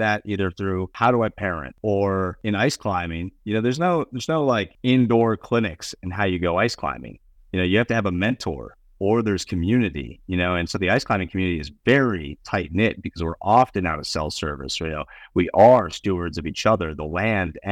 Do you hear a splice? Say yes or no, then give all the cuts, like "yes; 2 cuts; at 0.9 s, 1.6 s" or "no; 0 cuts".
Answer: yes; 4 cuts; at 0.9 s, 1.7 s, 2.4 s, 4.7 s